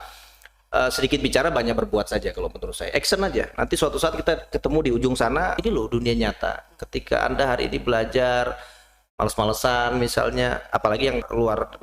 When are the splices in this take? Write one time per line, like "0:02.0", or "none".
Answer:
0:05.6